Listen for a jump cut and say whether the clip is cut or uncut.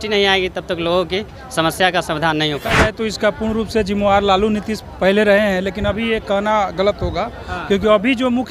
cut